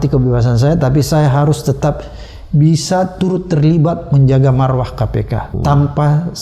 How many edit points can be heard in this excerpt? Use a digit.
1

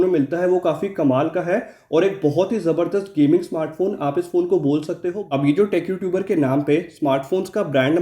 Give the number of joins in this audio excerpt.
1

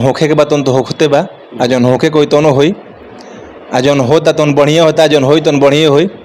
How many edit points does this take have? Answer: 0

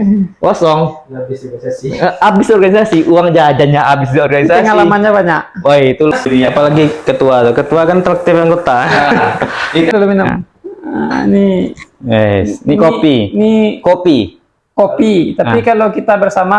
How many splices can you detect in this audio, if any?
0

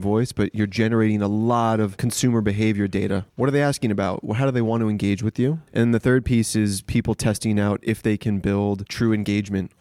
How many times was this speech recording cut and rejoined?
4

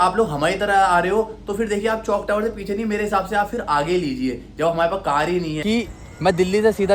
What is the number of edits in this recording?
1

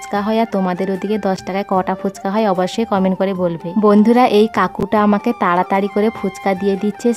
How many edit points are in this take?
0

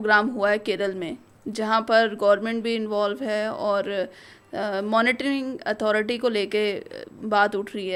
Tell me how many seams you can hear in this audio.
0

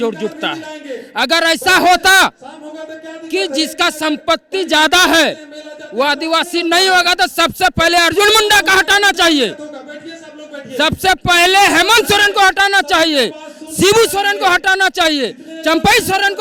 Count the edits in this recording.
0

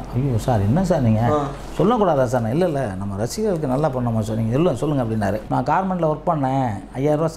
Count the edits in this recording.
1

